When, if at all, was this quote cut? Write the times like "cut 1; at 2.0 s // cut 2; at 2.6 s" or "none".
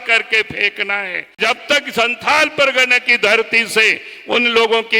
cut 1; at 1.4 s